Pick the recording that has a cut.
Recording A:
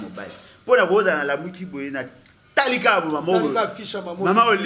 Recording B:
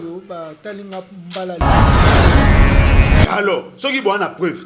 B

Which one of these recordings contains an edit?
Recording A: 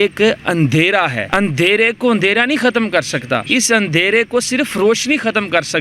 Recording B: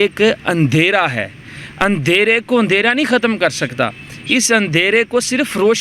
A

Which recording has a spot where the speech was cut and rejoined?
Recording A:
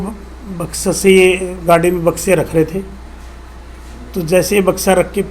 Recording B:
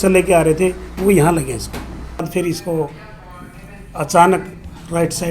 B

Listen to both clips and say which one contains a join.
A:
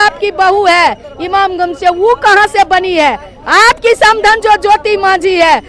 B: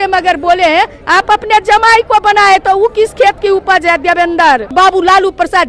B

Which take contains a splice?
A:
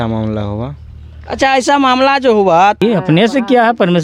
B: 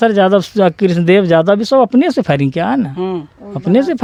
A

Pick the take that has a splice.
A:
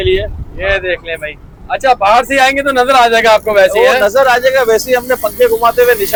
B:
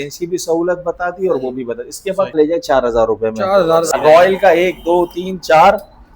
B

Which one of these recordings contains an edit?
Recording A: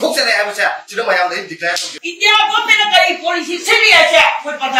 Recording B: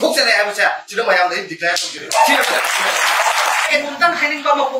A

